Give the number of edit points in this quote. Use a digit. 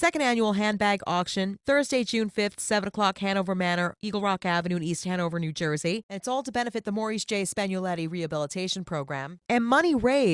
1